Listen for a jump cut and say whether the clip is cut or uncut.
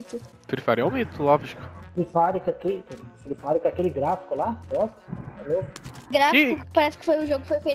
uncut